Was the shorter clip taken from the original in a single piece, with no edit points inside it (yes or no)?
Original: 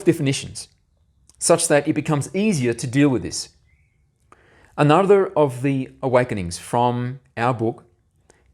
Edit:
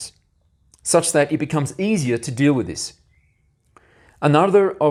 yes